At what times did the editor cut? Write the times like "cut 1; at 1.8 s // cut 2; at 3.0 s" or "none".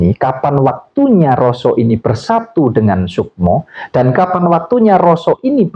none